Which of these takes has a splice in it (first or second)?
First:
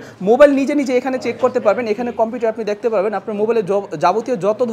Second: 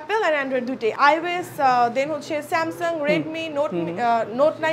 second